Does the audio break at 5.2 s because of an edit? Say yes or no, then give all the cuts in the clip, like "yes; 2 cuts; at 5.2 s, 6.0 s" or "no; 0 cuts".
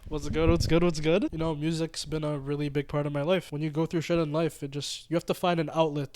no; 2 cuts; at 1.3 s, 3.5 s